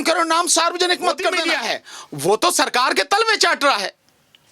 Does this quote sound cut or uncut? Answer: cut